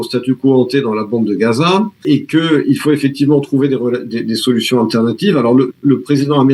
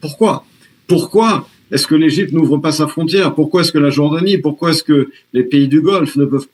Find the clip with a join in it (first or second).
first